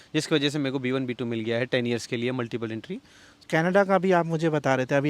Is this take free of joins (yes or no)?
no